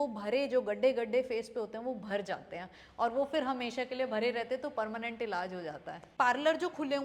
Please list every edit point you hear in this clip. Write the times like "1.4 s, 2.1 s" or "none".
6.0 s